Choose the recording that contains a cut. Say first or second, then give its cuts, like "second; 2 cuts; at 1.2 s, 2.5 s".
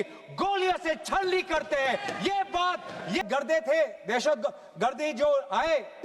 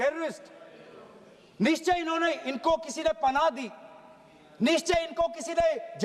first; 1 cut; at 3.2 s